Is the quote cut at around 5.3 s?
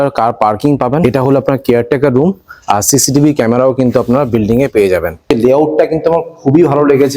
yes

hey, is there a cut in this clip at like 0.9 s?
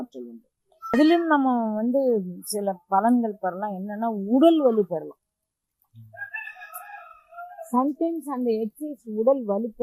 yes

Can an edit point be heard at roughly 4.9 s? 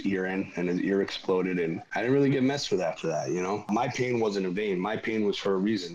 no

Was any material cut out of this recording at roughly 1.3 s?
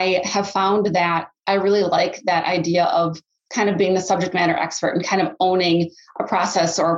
yes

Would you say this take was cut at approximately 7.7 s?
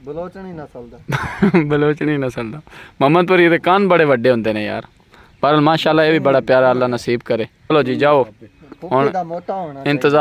yes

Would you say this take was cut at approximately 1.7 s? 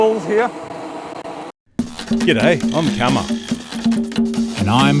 yes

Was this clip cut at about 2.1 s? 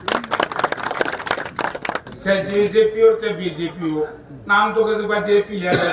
yes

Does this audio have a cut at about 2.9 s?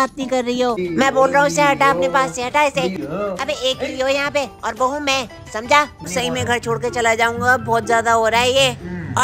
yes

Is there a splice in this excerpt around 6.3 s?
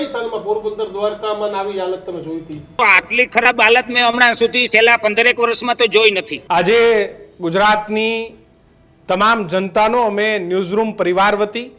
yes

